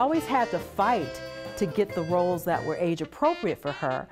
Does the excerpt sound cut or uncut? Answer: uncut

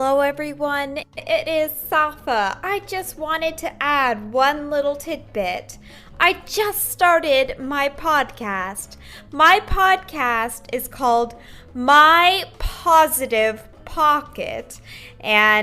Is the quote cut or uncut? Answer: cut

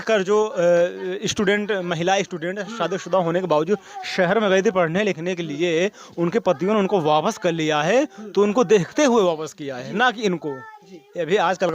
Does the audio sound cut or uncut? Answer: uncut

